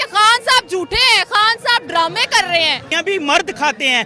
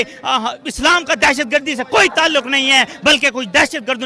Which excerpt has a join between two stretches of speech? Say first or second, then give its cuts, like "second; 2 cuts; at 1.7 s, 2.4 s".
first; 1 cut; at 3.0 s